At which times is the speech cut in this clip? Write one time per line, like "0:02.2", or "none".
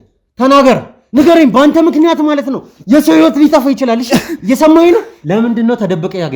0:01.0
0:05.1